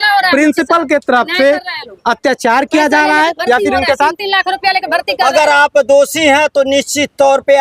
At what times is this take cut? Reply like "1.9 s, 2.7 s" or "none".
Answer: 5.3 s